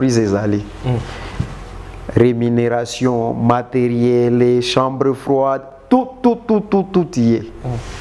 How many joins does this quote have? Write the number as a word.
zero